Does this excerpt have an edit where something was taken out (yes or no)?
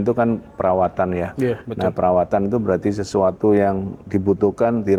no